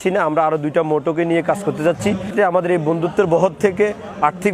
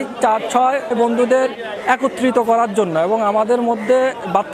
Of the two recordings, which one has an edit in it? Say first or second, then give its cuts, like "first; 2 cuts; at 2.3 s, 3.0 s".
first; 1 cut; at 2.3 s